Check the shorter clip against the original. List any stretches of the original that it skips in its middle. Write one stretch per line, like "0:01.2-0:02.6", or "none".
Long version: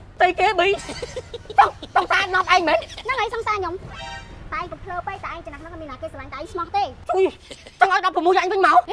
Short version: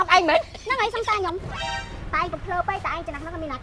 none